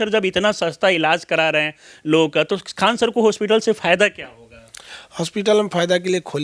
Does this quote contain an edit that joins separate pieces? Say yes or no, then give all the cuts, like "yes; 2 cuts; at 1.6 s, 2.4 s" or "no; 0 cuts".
no; 0 cuts